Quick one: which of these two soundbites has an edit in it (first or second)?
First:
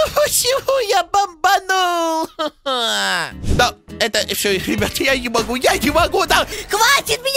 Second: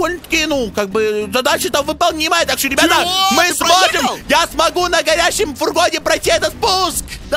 first